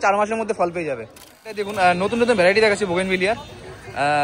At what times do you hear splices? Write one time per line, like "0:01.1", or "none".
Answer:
0:01.6